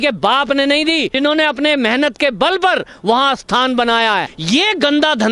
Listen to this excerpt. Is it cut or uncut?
cut